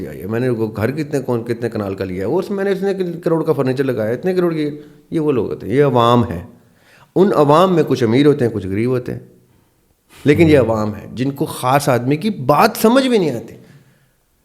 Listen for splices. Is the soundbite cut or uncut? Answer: uncut